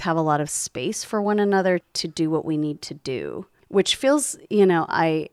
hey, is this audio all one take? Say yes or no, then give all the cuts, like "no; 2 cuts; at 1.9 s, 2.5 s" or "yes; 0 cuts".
no; 1 cut; at 1.9 s